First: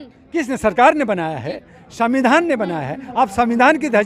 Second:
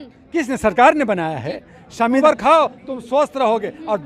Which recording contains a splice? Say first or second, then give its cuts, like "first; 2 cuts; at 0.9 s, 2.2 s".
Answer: second; 1 cut; at 2.2 s